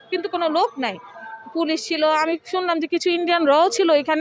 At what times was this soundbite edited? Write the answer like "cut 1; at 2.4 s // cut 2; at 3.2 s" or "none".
none